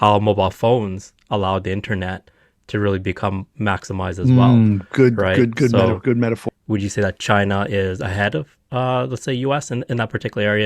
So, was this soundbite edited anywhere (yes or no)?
yes